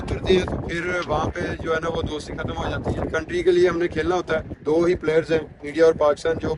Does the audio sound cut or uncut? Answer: cut